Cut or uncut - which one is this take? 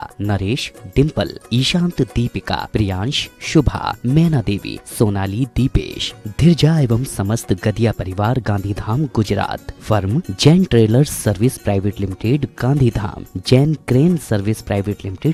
uncut